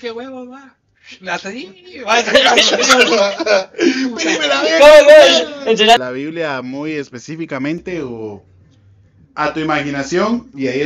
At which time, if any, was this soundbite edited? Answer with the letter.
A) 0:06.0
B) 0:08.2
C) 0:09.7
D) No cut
A